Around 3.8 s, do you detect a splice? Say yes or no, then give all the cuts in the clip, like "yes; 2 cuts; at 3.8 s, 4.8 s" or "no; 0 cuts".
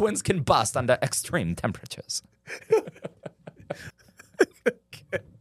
yes; 1 cut; at 3.8 s